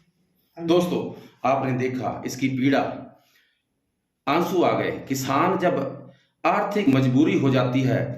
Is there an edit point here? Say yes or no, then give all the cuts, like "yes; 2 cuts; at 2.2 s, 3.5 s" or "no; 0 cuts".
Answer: yes; 1 cut; at 6.8 s